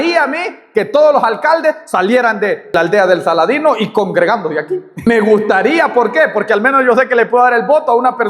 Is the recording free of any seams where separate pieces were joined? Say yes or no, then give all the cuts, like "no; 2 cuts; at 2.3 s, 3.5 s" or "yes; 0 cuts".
no; 2 cuts; at 2.7 s, 5.1 s